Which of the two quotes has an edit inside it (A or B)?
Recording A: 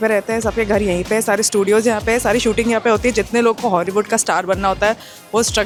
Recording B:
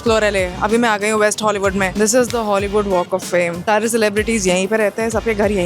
B